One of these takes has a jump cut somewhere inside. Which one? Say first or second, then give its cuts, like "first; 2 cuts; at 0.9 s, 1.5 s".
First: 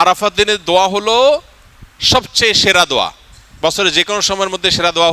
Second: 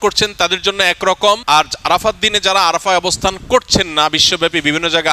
second; 1 cut; at 1.4 s